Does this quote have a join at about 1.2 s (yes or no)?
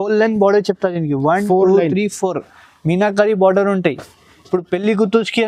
no